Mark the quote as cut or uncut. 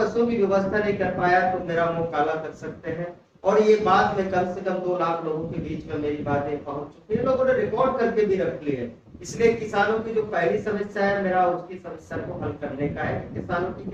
uncut